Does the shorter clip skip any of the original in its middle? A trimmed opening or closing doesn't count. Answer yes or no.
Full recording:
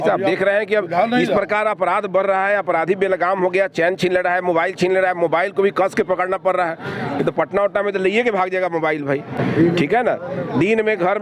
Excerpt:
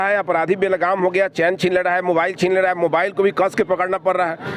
no